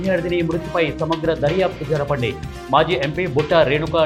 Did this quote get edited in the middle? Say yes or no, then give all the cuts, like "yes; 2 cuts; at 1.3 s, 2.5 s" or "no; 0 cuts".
no; 0 cuts